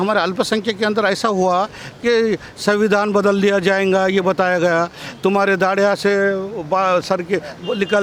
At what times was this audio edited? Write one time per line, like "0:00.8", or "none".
none